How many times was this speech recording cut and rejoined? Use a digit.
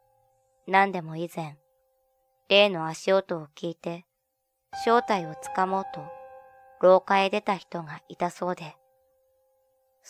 1